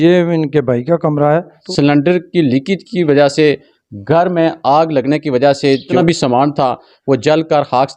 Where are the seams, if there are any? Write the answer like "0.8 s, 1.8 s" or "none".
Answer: 1.6 s, 5.9 s